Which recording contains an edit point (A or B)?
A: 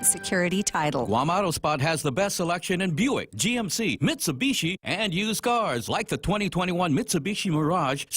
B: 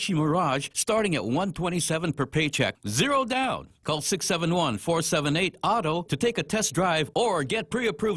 A